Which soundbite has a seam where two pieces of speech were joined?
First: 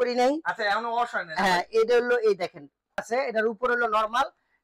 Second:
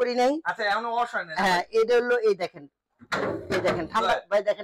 first; 1 cut; at 3.1 s

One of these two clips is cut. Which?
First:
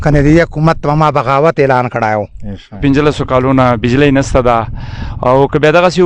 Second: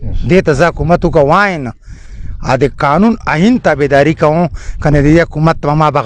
first; 1 cut; at 2.8 s

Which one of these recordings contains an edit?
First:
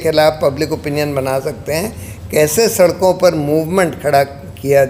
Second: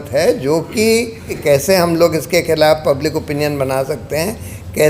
second; 1 cut; at 1.3 s

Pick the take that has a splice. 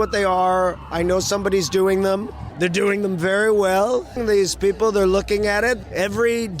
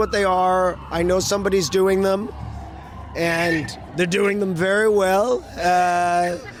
first; 3 cuts; at 2.4 s, 4.2 s, 5.8 s

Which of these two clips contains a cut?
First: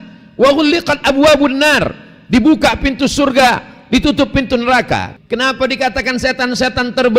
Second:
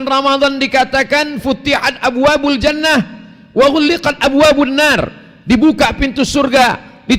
first; 1 cut; at 5.1 s

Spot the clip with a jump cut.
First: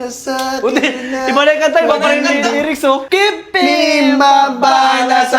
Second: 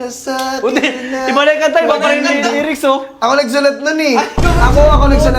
first; 1 cut; at 3.0 s

